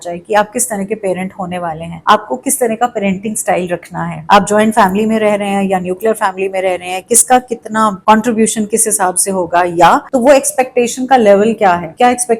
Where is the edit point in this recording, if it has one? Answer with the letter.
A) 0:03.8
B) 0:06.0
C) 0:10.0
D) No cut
C